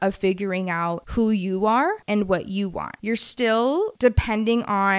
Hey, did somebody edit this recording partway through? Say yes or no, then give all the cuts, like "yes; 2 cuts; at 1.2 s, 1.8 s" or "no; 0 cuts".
yes; 4 cuts; at 1.0 s, 2.0 s, 2.9 s, 3.9 s